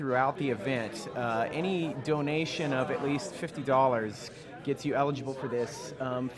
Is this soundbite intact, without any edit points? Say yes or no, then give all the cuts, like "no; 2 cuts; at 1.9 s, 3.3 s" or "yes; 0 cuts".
no; 1 cut; at 1.2 s